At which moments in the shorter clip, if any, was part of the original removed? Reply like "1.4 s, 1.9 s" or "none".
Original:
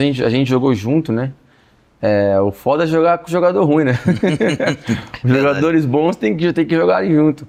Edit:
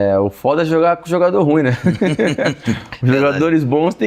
none